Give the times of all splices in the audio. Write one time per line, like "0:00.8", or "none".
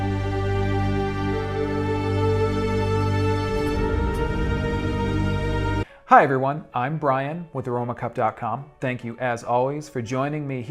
0:05.6